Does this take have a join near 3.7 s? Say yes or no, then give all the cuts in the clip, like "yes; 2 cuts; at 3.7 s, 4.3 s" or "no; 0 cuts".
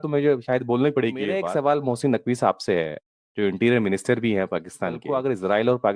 no; 2 cuts; at 1.5 s, 5.0 s